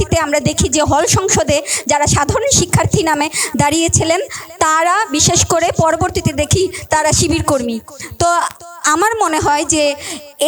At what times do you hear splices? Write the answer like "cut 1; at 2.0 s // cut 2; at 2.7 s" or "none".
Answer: none